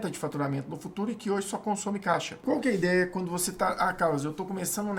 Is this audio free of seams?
no; 1 cut; at 2.3 s

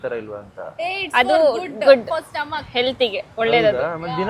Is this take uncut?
yes; 0 cuts

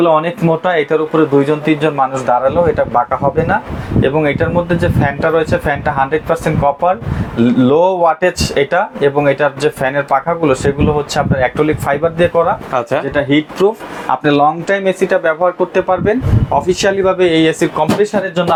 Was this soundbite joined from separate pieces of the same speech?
no; 0 cuts

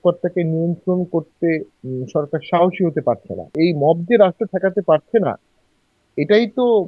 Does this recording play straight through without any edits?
no; 1 cut; at 3.5 s

